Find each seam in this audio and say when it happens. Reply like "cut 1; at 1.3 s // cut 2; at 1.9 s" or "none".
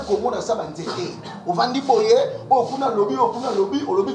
none